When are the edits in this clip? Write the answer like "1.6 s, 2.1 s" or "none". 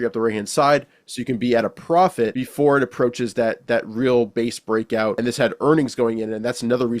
2.4 s, 5.2 s

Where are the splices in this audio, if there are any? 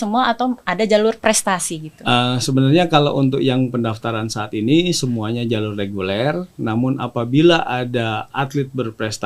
none

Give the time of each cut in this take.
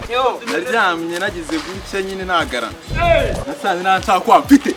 none

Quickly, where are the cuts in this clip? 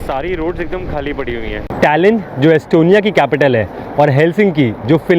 1.7 s

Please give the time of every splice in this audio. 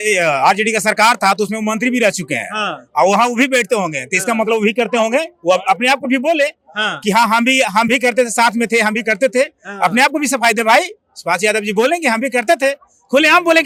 none

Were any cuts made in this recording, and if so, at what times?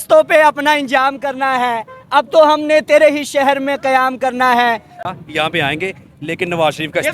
4.9 s

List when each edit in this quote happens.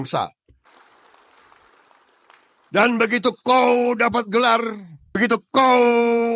none

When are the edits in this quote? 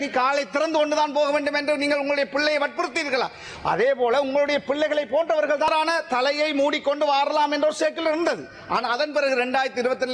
5.7 s

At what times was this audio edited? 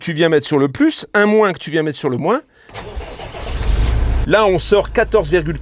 2.7 s, 4.1 s

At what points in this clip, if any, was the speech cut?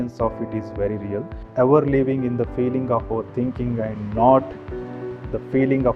1.4 s

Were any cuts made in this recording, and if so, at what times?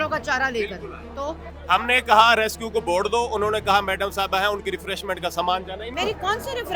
1.5 s, 5.9 s

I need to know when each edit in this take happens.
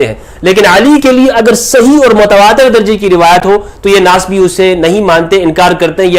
none

